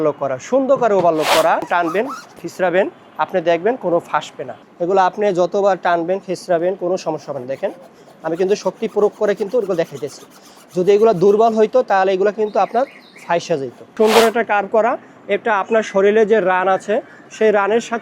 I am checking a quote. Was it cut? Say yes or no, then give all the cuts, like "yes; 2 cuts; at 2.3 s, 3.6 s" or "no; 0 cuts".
yes; 2 cuts; at 1.7 s, 13.8 s